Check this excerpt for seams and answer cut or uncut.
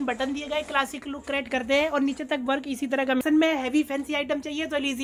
cut